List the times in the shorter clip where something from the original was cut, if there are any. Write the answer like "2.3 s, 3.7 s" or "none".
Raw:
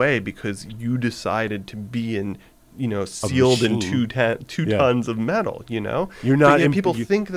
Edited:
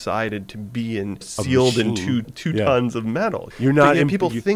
1.3 s, 2.3 s, 3.5 s